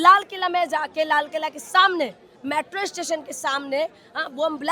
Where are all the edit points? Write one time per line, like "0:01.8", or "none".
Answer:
none